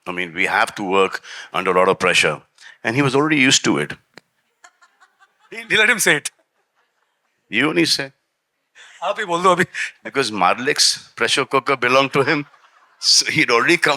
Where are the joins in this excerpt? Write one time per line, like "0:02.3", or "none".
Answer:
none